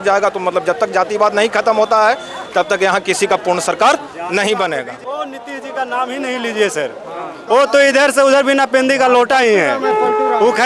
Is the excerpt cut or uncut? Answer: cut